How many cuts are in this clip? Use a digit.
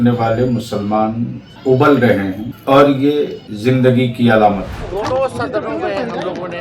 4